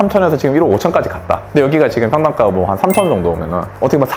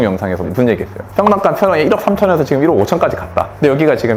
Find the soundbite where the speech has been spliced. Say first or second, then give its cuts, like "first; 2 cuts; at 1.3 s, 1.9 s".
second; 1 cut; at 1.0 s